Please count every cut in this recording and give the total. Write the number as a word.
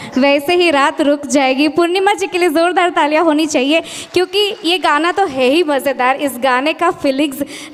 zero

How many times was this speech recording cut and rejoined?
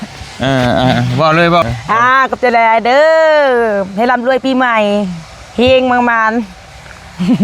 one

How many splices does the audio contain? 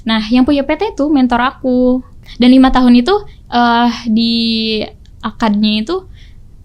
one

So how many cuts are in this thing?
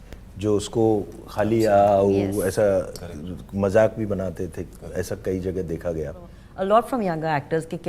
one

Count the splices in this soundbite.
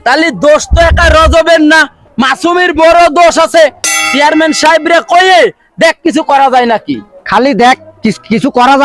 one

